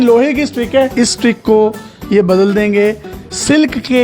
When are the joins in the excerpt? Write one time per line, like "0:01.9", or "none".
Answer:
0:00.9